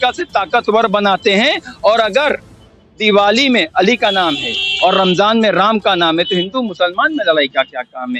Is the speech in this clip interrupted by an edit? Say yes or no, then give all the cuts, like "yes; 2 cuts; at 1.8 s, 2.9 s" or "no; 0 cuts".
no; 0 cuts